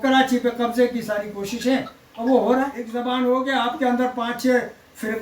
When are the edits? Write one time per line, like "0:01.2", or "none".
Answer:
0:02.8